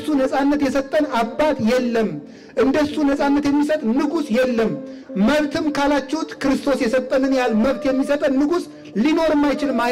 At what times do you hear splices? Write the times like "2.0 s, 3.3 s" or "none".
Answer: none